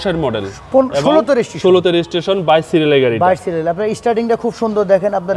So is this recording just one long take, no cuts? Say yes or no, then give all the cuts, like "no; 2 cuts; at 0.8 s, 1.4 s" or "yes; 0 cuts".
yes; 0 cuts